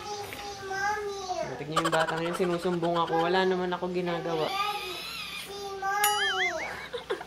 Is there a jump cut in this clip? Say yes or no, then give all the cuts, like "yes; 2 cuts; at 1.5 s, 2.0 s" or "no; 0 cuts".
no; 0 cuts